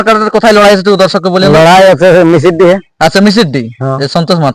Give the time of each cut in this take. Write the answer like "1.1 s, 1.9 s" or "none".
none